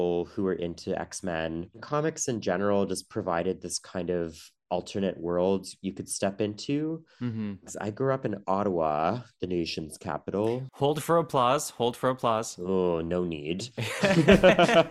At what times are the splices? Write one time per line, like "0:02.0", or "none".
0:01.7
0:07.6

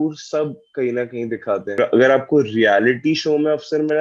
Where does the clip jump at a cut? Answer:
0:01.7

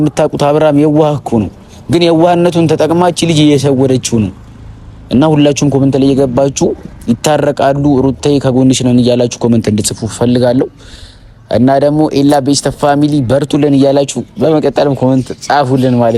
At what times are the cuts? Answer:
none

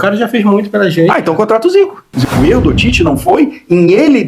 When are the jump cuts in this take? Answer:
0:02.2

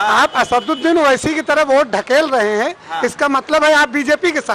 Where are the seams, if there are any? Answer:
0:01.4

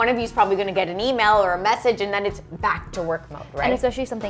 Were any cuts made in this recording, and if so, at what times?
none

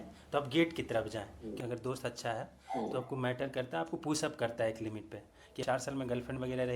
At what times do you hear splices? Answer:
0:01.5
0:05.6

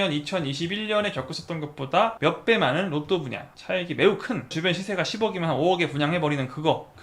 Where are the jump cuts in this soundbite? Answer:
none

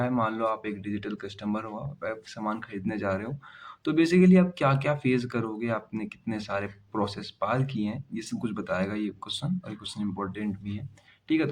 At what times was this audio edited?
none

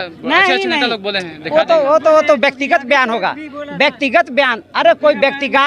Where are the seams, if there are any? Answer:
none

